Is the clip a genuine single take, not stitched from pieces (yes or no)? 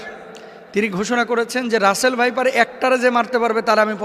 yes